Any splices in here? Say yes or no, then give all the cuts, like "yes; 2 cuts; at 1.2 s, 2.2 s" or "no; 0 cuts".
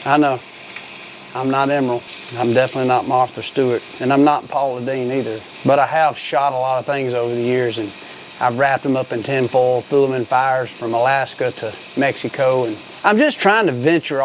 yes; 4 cuts; at 2.2 s, 3.9 s, 5.4 s, 12.8 s